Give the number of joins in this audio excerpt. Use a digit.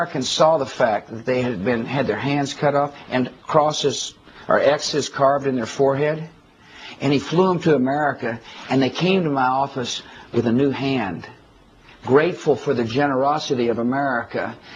0